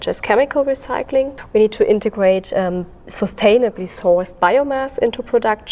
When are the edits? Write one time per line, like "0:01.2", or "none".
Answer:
0:01.4